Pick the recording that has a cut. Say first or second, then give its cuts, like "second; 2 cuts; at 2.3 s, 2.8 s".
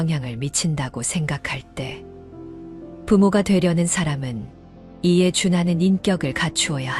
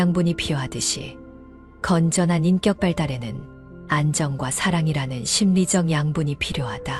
first; 2 cuts; at 1.8 s, 3.1 s